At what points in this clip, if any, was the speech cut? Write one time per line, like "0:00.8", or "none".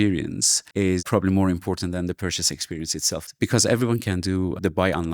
0:01.0